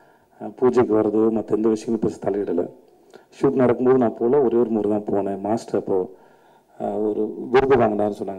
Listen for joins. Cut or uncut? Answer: uncut